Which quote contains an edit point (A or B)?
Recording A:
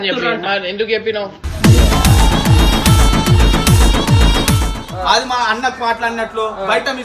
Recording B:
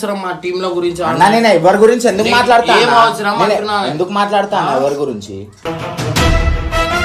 A